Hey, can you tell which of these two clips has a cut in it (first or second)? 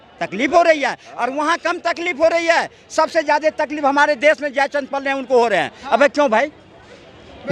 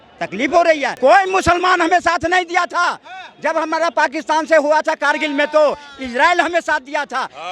second